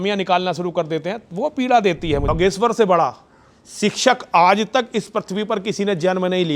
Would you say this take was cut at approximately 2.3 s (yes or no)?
yes